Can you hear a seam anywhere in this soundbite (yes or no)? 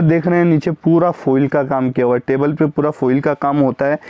no